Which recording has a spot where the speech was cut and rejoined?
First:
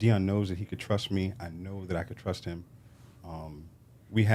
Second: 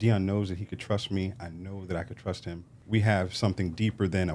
second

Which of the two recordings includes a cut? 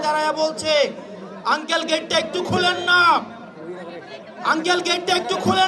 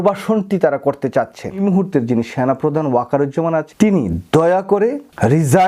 second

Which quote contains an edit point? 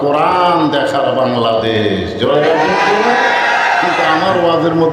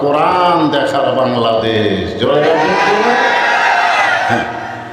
first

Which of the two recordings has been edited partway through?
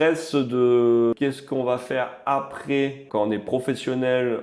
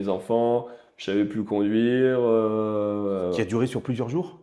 first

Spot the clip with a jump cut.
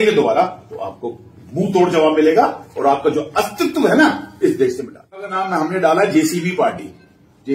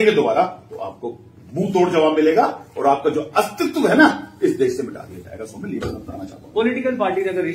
first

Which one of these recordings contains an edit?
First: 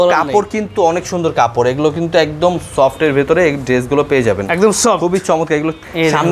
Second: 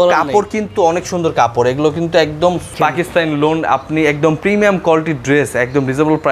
second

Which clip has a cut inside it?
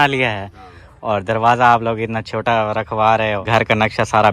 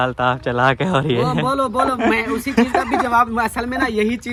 first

